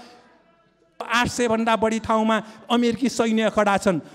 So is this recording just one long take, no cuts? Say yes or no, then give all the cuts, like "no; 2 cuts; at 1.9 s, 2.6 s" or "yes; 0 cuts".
no; 1 cut; at 1.0 s